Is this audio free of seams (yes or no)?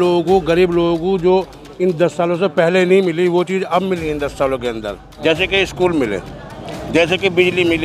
no